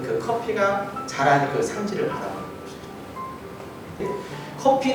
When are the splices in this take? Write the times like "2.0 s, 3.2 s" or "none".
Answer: 4.1 s